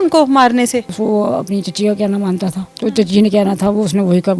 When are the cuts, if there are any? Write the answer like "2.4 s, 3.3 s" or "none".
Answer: 0.9 s, 2.7 s

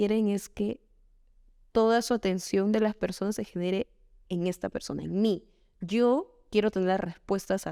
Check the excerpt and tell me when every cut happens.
none

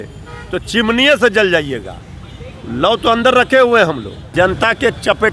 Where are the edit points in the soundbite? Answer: 4.1 s

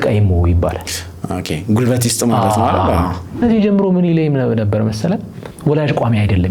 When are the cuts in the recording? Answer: 3.4 s

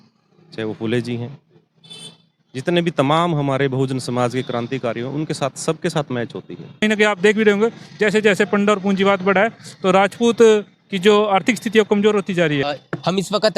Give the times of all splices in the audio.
6.8 s, 12.6 s

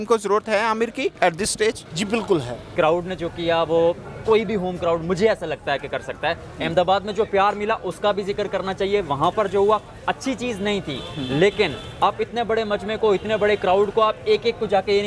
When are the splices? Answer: 1.1 s, 1.9 s, 2.7 s

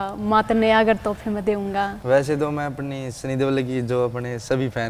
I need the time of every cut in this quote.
2.0 s

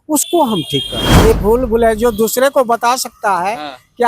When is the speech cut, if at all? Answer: 1.0 s

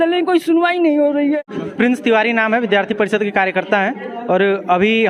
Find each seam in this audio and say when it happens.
1.6 s

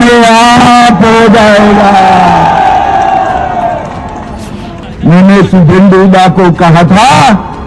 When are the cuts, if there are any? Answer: 4.8 s

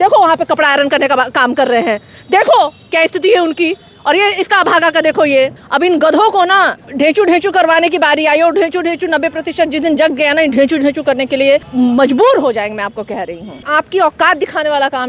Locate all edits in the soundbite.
5.6 s, 6.8 s, 11.7 s, 13.6 s

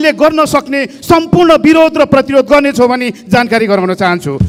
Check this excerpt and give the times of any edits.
none

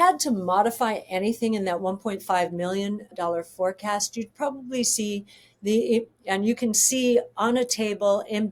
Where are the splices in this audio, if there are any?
none

